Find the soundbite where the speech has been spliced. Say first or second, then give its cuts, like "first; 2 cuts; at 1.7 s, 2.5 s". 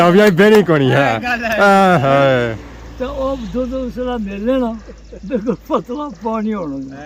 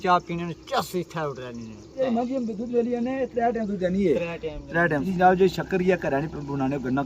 second; 2 cuts; at 2.0 s, 5.0 s